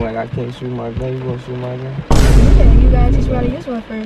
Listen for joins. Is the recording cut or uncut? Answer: uncut